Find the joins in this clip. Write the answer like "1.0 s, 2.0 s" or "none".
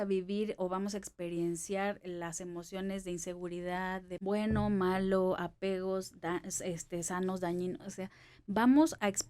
4.1 s